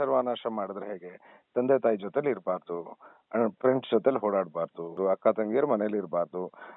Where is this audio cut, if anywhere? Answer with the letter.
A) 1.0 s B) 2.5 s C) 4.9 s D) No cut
C